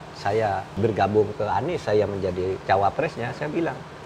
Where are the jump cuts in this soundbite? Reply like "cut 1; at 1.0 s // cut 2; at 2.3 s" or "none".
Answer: cut 1; at 0.8 s // cut 2; at 2.6 s

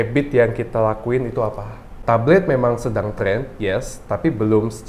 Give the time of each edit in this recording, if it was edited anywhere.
cut 1; at 1.9 s

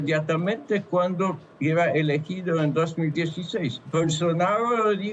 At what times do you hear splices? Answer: cut 1; at 3.6 s

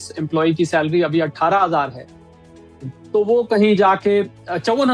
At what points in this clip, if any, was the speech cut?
none

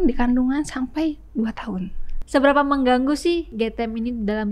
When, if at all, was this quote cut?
cut 1; at 2.1 s // cut 2; at 3.5 s

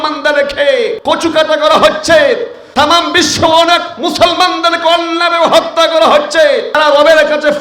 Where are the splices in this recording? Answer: cut 1; at 1.0 s // cut 2; at 2.6 s // cut 3; at 6.7 s

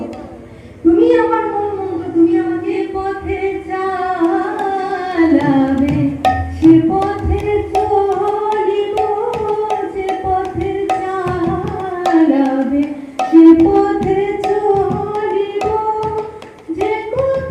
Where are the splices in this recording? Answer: cut 1; at 2.7 s

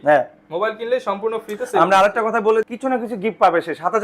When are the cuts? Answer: cut 1; at 2.7 s

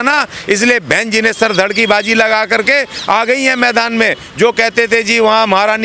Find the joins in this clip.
none

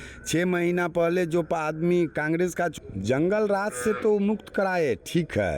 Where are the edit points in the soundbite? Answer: cut 1; at 2.7 s

